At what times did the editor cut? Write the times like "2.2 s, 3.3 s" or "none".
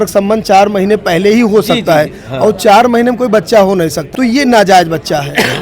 4.0 s